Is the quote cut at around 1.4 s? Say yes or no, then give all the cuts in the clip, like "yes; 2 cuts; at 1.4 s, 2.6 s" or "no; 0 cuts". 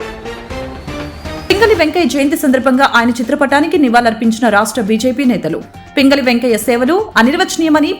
yes; 1 cut; at 1.4 s